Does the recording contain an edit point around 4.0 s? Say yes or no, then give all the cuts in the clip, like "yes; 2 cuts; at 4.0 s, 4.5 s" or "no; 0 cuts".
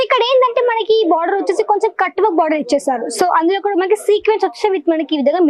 no; 0 cuts